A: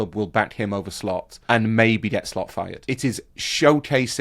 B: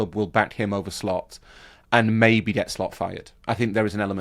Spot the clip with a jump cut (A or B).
A